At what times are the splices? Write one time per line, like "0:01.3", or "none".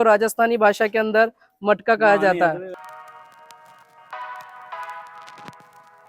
0:02.7